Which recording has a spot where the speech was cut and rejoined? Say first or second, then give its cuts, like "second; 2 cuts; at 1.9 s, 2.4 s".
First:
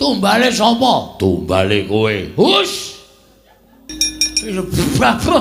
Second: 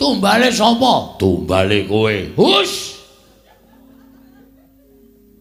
first; 1 cut; at 3.9 s